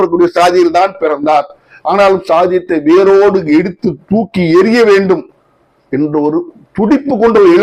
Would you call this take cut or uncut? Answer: uncut